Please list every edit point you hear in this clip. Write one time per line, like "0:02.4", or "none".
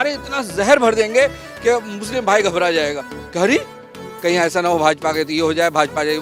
none